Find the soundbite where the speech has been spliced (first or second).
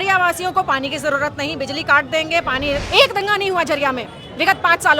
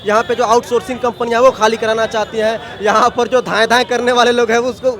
first